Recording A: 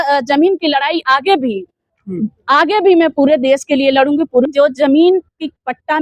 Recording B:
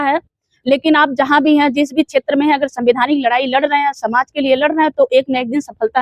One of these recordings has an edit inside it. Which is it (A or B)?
A